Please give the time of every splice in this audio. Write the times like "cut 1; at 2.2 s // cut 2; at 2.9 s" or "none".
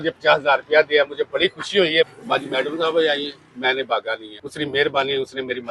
cut 1; at 2.1 s // cut 2; at 4.3 s